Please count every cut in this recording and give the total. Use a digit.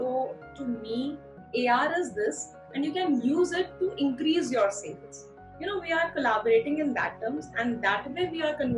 1